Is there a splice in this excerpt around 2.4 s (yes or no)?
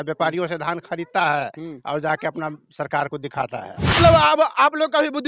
no